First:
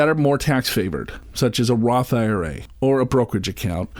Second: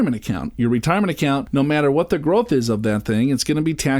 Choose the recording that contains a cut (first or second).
second